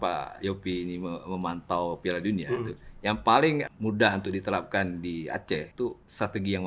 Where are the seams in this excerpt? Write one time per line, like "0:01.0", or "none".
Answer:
0:03.6
0:05.7